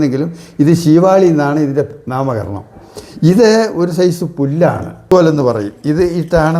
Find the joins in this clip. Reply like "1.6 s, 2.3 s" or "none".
5.1 s